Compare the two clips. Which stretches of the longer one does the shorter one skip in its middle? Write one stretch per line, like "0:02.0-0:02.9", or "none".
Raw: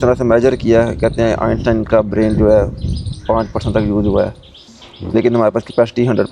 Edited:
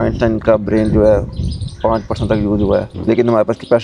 0:04.4-0:05.0